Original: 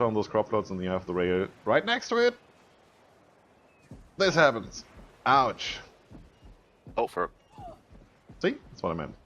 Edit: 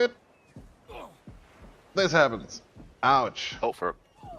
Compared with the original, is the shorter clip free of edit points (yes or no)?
no